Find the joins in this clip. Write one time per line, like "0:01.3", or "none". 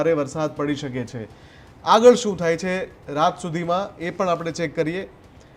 none